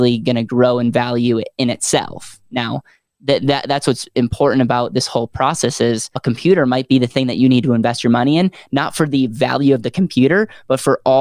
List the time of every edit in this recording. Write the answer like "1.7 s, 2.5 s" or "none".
6.1 s